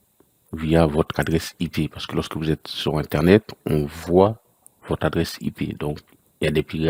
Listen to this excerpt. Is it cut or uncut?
uncut